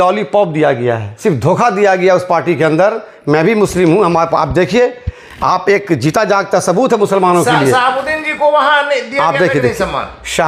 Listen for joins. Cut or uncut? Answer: uncut